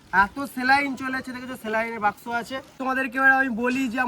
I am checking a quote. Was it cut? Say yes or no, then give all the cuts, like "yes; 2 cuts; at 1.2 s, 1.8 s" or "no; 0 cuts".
yes; 1 cut; at 2.7 s